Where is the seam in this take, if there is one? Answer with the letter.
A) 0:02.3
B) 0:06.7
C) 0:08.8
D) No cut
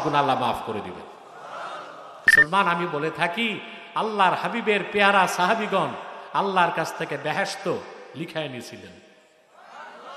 A